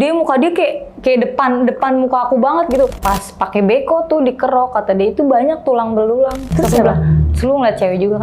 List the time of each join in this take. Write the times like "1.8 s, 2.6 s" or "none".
2.9 s, 6.4 s